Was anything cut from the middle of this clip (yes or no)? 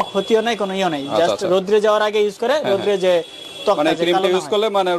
no